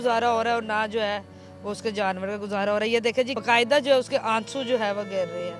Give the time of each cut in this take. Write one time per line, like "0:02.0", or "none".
0:03.4